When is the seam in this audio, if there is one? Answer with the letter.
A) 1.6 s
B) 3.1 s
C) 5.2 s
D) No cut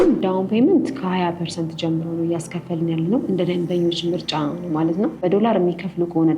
C